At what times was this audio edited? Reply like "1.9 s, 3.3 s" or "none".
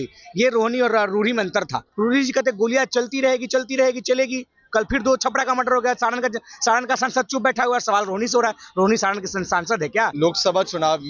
2.0 s, 10.1 s